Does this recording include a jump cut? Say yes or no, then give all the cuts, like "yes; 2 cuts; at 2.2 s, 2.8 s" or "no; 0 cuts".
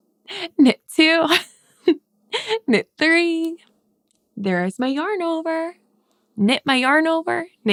no; 0 cuts